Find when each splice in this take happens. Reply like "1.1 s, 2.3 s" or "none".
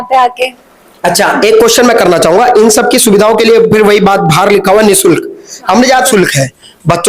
6.1 s